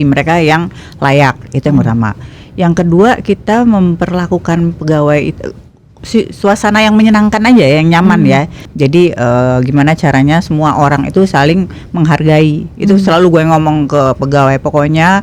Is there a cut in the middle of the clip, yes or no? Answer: no